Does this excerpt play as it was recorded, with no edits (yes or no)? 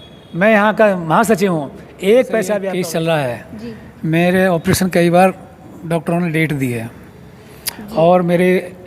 no